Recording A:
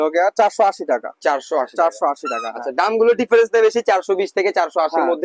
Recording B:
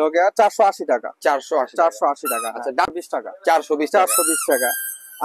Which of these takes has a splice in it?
B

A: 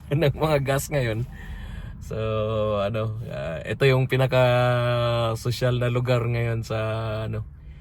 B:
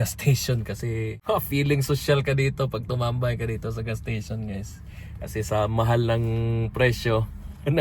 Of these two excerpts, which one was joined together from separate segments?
B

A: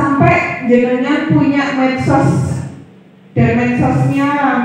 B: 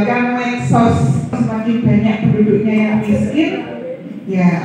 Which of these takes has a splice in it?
B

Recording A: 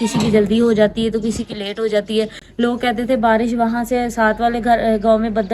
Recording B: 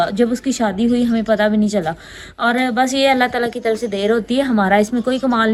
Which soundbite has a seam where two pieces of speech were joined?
A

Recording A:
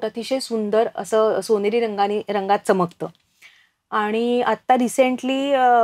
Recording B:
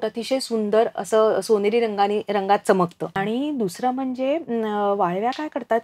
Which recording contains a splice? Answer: B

